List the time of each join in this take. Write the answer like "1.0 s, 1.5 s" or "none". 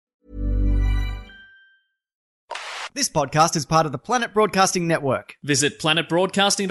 2.3 s